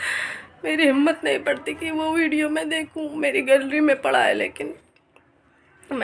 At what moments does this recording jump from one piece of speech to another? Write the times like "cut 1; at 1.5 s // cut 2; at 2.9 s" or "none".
none